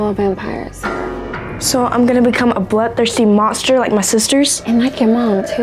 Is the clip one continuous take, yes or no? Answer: no